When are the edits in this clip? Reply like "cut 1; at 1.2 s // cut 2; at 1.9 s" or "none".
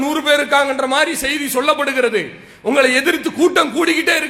none